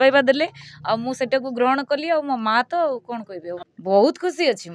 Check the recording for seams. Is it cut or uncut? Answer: cut